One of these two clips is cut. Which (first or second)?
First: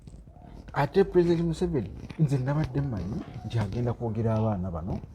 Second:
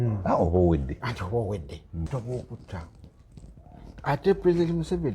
second